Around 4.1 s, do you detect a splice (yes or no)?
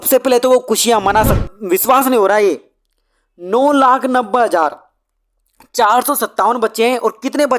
no